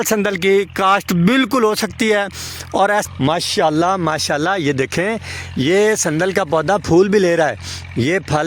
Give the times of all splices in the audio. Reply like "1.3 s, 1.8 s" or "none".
3.0 s